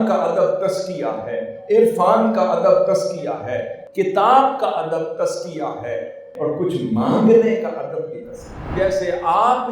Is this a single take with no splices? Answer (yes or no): no